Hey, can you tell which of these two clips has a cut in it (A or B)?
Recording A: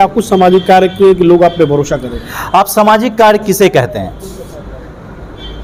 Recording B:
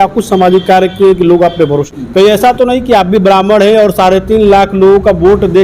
B